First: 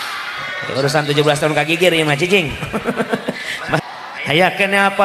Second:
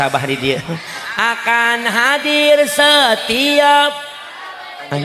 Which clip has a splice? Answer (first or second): first